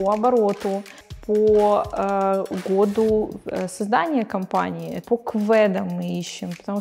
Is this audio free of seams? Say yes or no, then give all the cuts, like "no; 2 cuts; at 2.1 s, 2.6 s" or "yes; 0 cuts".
no; 2 cuts; at 1.1 s, 5.0 s